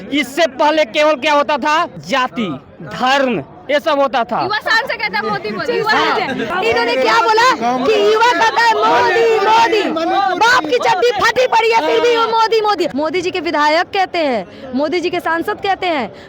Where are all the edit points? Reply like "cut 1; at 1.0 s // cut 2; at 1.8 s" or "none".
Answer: cut 1; at 2.0 s // cut 2; at 6.5 s // cut 3; at 12.9 s

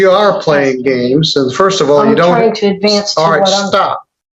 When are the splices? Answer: none

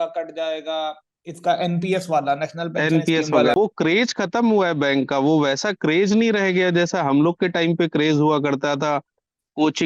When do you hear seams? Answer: cut 1; at 3.5 s

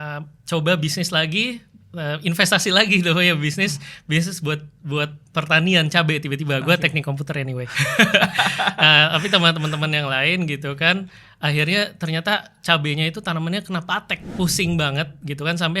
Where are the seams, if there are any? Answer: cut 1; at 14.2 s

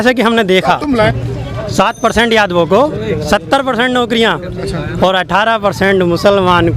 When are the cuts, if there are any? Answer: cut 1; at 1.1 s

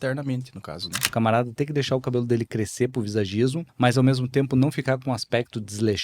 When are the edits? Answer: cut 1; at 1.1 s // cut 2; at 3.6 s

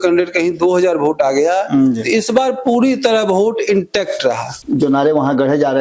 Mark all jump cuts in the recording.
cut 1; at 4.5 s

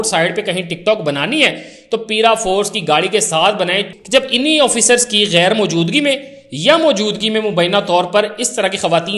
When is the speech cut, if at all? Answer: cut 1; at 3.9 s

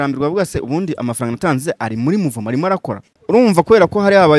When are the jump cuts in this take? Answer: cut 1; at 3.1 s

